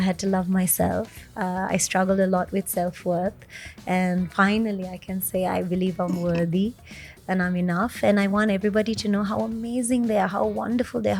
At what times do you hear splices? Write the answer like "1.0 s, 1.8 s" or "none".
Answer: none